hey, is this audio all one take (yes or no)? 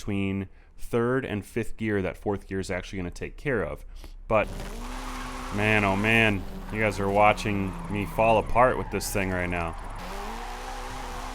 no